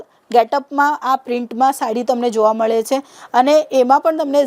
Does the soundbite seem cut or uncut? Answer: uncut